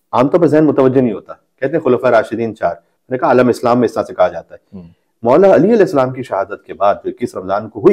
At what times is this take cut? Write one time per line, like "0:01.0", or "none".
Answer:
none